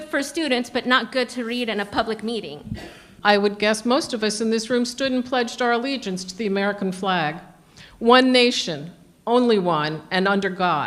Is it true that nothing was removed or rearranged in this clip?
no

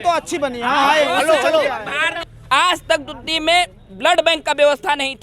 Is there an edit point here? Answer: yes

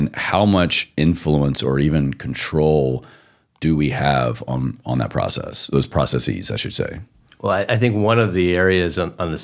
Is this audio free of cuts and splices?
yes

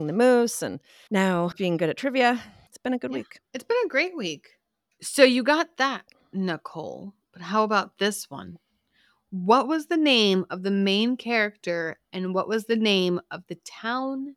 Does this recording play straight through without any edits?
yes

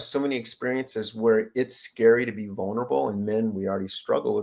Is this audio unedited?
yes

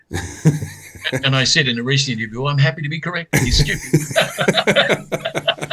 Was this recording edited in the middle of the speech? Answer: no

